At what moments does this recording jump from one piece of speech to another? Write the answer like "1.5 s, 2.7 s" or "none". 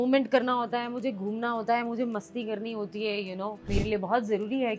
3.7 s